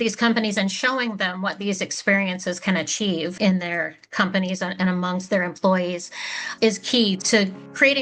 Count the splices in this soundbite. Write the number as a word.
three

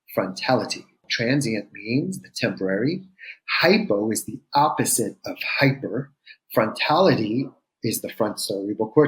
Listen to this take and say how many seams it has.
one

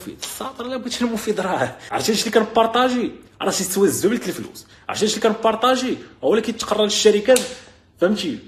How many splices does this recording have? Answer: one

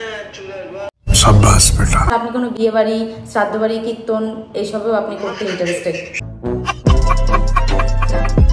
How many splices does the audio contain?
two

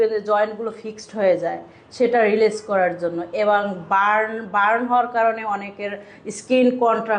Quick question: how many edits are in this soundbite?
zero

